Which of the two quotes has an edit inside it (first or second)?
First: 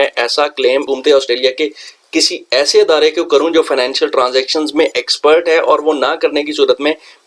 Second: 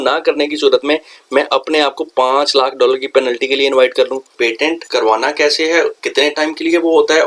second